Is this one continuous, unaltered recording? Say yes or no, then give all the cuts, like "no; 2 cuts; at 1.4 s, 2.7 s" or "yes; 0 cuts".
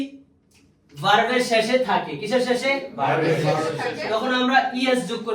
yes; 0 cuts